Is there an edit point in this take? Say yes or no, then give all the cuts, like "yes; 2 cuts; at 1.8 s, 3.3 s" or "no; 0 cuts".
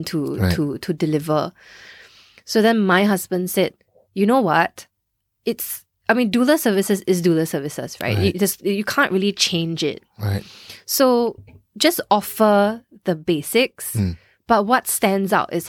no; 0 cuts